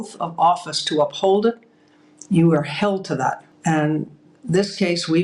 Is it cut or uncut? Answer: cut